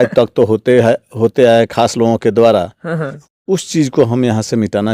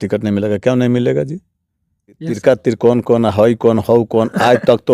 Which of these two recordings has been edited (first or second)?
second